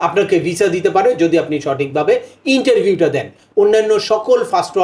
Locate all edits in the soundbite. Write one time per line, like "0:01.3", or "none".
0:03.4